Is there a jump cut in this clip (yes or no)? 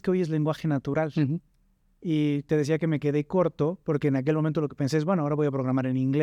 no